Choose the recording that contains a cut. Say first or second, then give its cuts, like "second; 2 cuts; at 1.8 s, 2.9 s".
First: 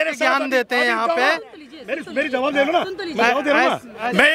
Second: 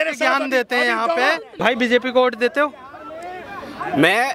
second; 1 cut; at 1.5 s